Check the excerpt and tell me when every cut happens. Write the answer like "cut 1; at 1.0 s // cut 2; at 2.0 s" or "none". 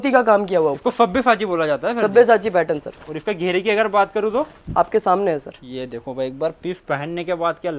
none